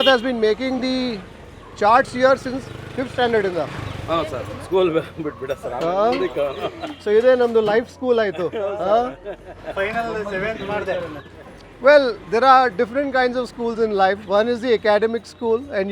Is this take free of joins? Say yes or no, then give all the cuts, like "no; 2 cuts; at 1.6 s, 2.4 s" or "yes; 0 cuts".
yes; 0 cuts